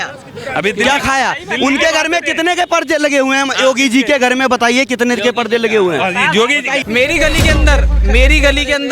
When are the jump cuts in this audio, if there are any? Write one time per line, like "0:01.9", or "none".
0:06.8